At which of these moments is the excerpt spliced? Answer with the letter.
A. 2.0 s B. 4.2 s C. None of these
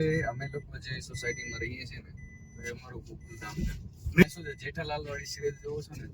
B